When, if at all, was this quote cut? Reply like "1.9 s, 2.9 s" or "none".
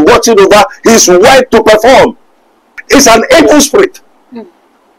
2.8 s